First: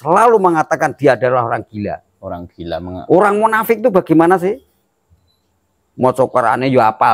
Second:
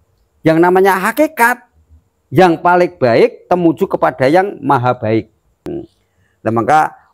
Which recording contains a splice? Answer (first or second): second